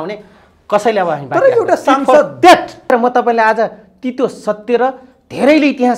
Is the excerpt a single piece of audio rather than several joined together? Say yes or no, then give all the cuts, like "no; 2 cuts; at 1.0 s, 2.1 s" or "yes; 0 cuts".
no; 1 cut; at 2.9 s